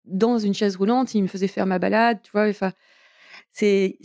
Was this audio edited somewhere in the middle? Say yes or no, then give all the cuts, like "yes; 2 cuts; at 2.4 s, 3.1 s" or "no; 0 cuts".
no; 0 cuts